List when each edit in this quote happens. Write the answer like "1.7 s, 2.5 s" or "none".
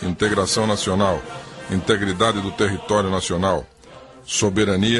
2.8 s